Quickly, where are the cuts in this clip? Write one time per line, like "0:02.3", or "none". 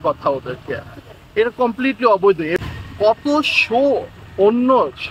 0:02.5